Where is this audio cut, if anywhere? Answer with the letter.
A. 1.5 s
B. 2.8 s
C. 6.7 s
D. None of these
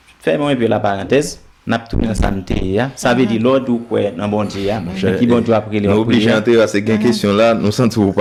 D